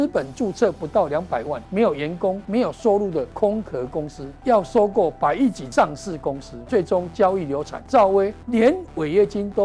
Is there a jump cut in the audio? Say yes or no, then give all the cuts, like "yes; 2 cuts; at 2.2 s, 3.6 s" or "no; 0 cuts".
yes; 8 cuts; at 1.6 s, 2.4 s, 3.3 s, 4.2 s, 5.6 s, 6.5 s, 7.7 s, 8.4 s